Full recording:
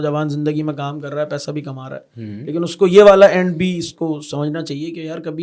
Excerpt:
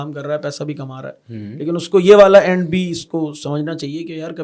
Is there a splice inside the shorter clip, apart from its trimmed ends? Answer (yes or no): no